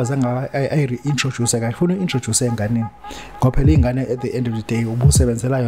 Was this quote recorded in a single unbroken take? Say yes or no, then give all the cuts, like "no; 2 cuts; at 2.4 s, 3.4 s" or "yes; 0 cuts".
yes; 0 cuts